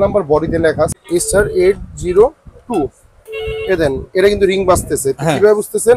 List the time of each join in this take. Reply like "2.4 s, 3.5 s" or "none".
0.9 s